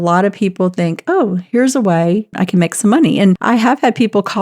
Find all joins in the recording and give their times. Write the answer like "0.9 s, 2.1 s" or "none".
2.3 s, 3.4 s